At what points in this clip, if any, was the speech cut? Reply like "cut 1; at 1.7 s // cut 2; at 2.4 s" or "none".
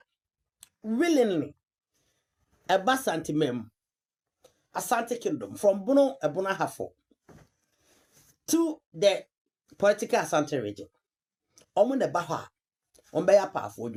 none